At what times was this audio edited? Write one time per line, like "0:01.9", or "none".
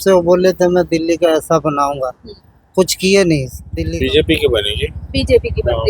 0:03.6